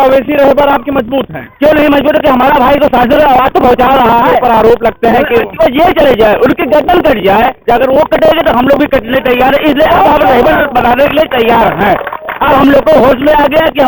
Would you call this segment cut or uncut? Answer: uncut